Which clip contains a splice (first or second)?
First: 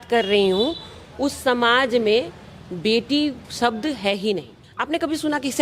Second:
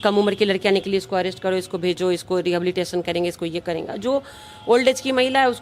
first